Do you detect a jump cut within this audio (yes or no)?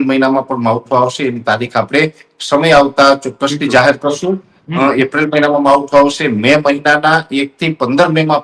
no